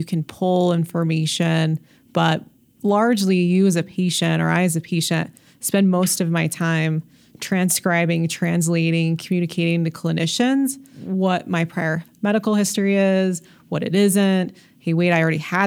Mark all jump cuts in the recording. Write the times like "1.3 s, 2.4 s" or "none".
10.9 s